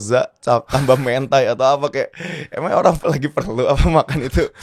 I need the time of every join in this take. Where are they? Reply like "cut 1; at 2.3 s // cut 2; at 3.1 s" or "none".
none